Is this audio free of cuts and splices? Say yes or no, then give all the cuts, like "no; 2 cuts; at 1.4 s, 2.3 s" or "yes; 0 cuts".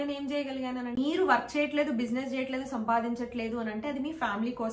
no; 1 cut; at 0.9 s